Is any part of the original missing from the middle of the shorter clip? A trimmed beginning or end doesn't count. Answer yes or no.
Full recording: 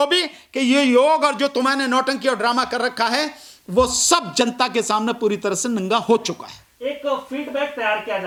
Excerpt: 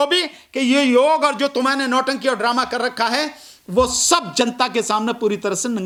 no